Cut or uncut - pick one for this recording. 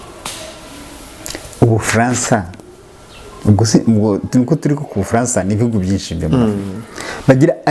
uncut